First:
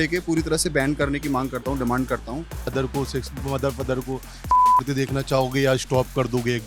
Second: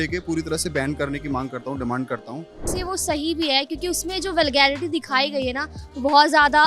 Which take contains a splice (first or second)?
first